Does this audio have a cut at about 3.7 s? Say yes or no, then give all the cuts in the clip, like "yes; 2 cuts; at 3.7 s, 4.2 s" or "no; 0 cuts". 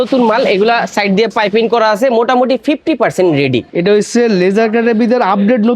yes; 1 cut; at 3.7 s